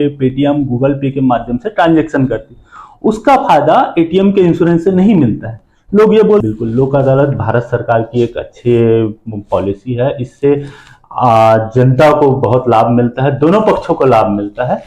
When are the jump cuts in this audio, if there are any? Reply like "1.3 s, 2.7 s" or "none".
6.4 s